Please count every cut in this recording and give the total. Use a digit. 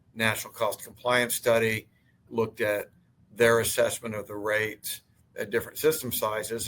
1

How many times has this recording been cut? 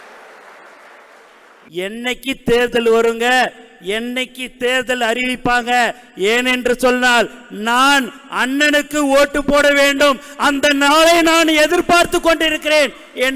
1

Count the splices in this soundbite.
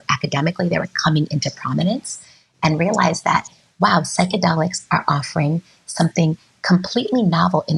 0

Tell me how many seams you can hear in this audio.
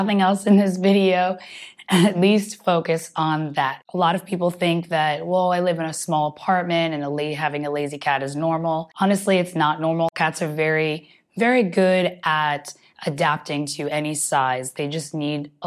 2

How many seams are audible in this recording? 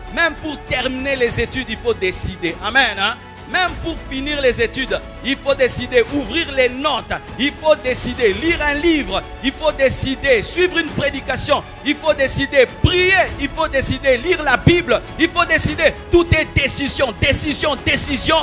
0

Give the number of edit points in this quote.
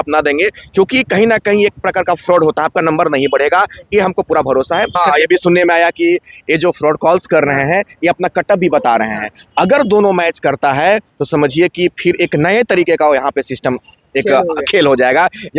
1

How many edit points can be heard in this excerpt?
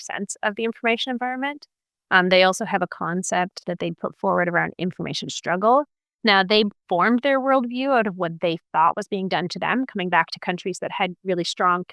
0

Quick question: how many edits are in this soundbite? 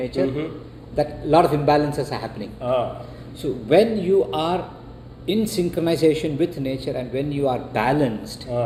0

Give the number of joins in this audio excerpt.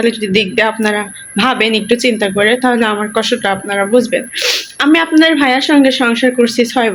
0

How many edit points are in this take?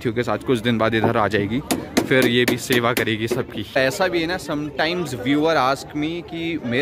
0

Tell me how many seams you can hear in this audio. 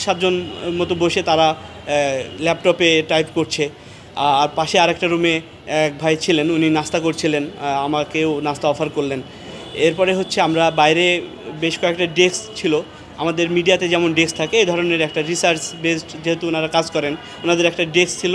0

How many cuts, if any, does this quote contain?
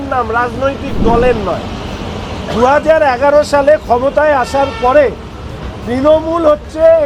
0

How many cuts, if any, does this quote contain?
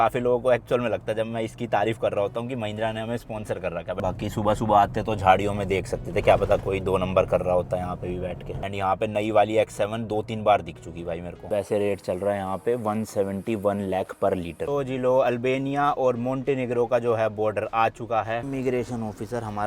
5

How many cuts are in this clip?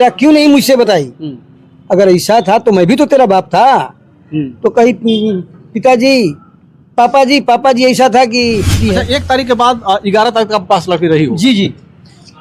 1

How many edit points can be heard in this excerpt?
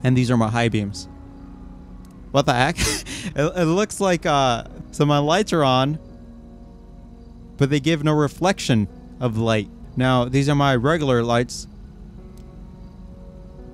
1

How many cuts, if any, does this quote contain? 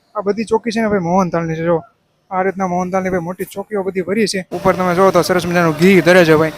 1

